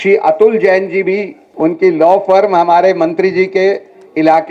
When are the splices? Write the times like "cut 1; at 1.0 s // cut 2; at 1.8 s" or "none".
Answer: cut 1; at 1.4 s